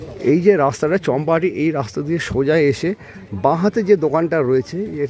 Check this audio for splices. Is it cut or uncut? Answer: uncut